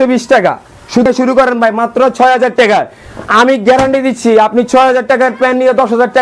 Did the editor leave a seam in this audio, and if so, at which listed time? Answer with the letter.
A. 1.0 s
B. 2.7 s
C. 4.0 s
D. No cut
A